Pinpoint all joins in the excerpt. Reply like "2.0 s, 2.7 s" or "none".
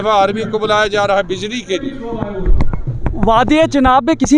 none